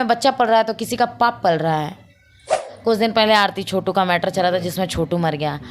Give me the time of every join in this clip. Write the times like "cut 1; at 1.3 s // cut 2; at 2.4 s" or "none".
cut 1; at 2.6 s